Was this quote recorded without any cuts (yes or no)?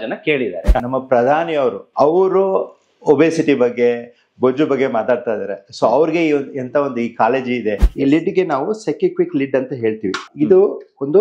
no